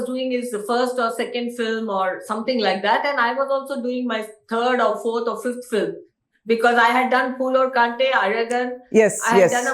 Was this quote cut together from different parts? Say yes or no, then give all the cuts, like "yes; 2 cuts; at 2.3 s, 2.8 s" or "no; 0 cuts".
no; 0 cuts